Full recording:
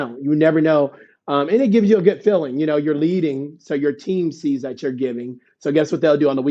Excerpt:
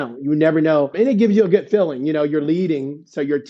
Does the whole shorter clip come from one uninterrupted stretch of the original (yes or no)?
no